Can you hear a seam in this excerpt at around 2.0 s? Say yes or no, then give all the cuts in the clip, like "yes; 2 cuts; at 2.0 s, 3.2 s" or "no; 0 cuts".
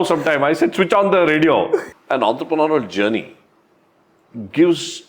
yes; 1 cut; at 2.0 s